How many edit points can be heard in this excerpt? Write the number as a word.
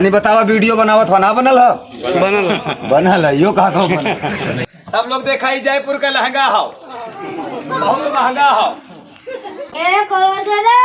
two